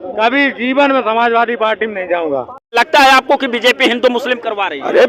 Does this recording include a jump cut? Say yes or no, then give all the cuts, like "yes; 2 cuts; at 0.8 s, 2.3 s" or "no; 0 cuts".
yes; 1 cut; at 2.8 s